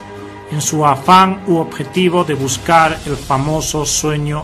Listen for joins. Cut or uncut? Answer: cut